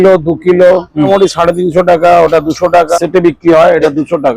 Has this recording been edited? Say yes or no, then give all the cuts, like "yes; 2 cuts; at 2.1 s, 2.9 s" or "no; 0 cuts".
yes; 2 cuts; at 1.1 s, 2.9 s